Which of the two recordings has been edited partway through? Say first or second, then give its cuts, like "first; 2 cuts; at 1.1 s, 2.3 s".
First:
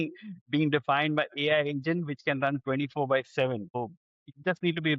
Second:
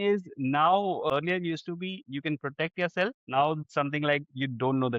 second; 2 cuts; at 1.1 s, 3.2 s